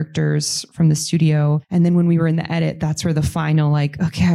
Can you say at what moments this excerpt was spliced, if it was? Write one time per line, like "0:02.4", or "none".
0:01.6